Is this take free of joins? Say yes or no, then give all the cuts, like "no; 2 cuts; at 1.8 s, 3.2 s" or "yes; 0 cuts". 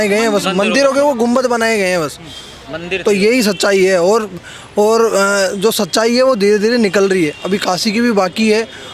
yes; 0 cuts